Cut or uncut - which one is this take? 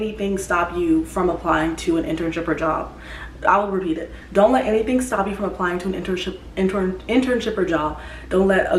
uncut